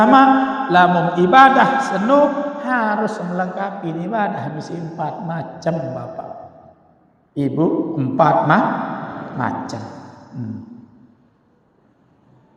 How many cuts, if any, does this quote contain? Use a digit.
0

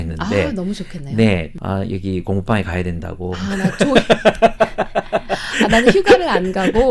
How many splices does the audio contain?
1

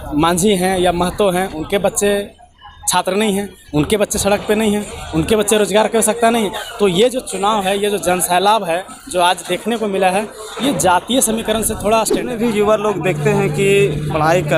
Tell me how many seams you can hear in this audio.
1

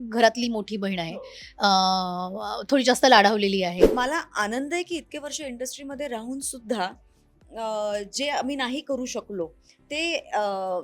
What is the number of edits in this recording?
1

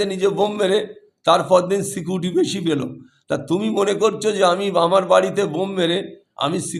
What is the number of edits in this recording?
0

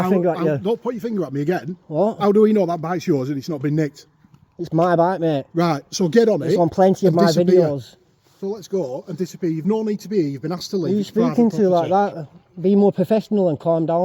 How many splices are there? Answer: 1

